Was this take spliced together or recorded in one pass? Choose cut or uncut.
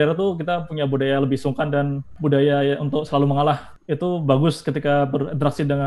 cut